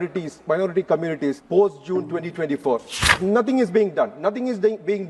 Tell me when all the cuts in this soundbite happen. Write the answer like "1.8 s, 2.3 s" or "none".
1.4 s, 3.1 s